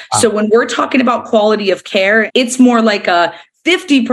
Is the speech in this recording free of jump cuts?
no; 1 cut; at 2.3 s

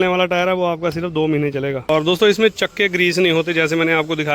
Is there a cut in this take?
yes; 1 cut; at 1.9 s

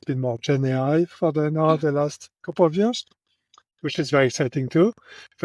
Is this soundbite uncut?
yes; 0 cuts

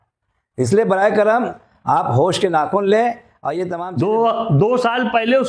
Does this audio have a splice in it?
yes; 1 cut; at 3.7 s

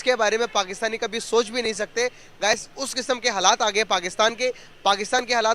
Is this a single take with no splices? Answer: yes; 0 cuts

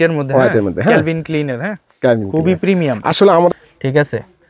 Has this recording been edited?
yes; 1 cut; at 3.5 s

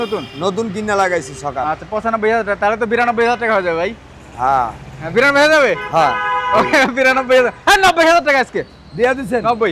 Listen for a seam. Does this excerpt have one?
no; 0 cuts

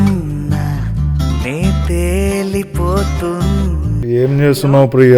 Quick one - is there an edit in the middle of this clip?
yes; 1 cut; at 4.0 s

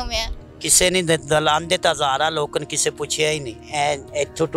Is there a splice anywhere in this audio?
yes; 1 cut; at 3.6 s

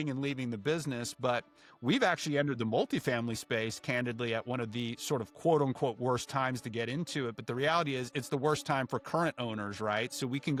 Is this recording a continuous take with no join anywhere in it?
yes; 0 cuts

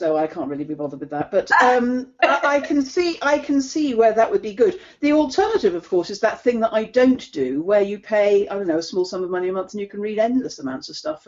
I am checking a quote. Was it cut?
no; 0 cuts

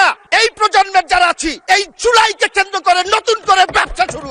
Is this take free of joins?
yes; 0 cuts

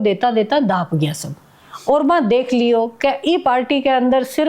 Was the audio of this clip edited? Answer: no; 0 cuts

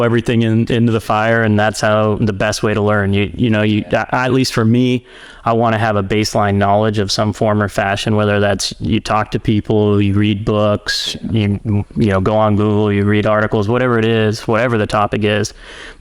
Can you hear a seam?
no; 0 cuts

